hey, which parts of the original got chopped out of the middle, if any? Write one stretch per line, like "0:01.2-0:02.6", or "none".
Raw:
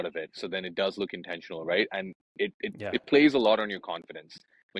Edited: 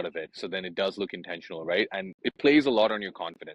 0:02.2-0:02.8